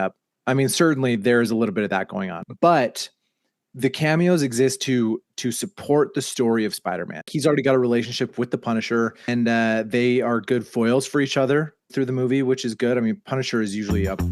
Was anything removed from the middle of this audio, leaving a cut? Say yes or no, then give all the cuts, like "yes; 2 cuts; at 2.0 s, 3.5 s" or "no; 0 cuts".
yes; 3 cuts; at 2.4 s, 7.3 s, 9.3 s